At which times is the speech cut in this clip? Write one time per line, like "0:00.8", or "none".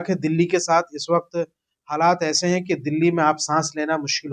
none